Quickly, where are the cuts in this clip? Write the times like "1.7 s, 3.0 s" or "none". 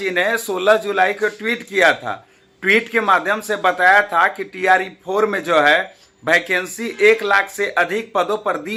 none